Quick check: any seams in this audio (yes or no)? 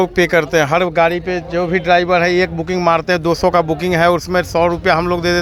no